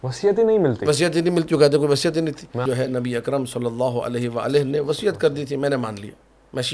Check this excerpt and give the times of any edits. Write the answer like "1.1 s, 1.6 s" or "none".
2.6 s